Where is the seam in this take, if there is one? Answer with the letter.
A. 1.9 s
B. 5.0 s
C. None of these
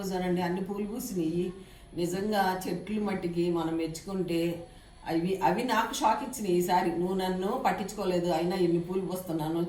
C